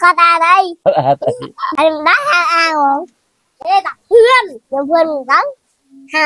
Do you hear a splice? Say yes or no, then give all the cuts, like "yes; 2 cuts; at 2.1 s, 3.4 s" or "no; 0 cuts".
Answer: yes; 1 cut; at 1.6 s